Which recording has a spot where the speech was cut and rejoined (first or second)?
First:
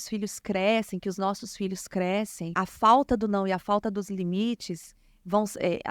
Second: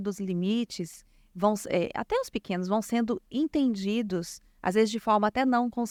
first